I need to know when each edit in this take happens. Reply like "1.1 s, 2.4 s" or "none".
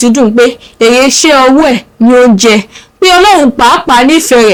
none